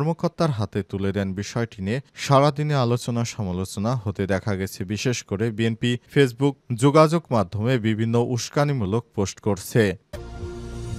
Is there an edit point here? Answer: yes; 1 cut; at 10.1 s

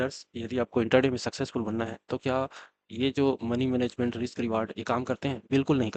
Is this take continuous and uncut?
yes; 0 cuts

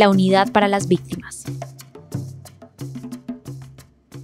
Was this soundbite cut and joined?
yes; 1 cut; at 1.3 s

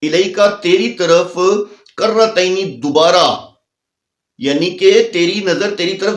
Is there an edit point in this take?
no; 0 cuts

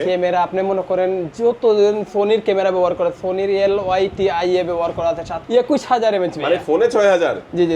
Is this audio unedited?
no; 1 cut; at 5.3 s

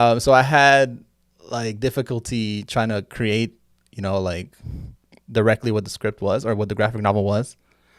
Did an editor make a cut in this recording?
no; 0 cuts

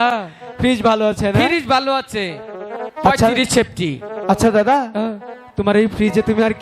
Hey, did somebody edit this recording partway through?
no; 0 cuts

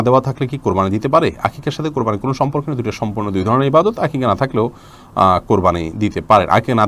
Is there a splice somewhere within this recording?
no; 0 cuts

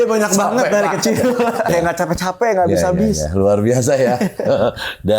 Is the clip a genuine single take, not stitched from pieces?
no; 1 cut; at 1.7 s

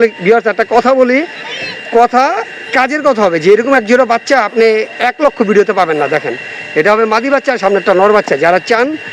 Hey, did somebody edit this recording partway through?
no; 0 cuts

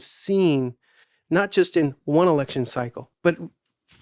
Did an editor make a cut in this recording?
yes; 1 cut; at 3.0 s

